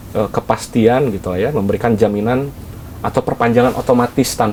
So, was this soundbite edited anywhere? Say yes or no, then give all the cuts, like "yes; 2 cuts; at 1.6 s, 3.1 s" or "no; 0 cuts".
no; 0 cuts